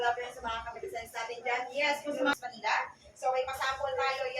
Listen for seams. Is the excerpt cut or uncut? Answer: cut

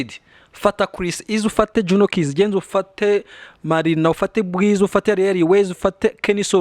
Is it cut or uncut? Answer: uncut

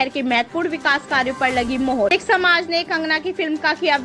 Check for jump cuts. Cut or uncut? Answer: cut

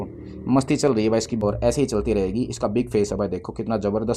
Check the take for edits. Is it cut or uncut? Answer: cut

